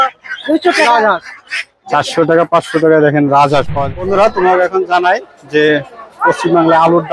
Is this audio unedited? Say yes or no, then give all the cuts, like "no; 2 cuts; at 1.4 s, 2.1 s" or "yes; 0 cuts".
no; 1 cut; at 3.9 s